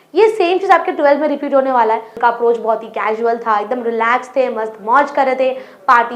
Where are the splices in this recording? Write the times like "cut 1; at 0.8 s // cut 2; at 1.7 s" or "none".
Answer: cut 1; at 2.1 s